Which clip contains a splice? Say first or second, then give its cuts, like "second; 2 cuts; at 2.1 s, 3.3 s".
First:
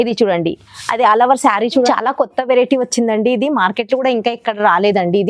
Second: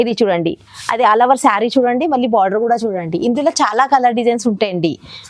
first; 1 cut; at 1.9 s